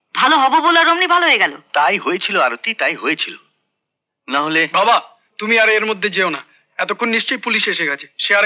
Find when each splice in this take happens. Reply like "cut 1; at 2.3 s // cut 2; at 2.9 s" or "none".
none